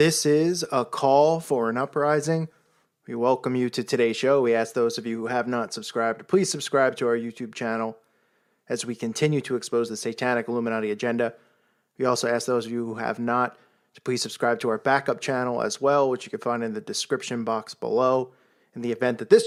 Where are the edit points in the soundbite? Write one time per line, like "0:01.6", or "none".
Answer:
none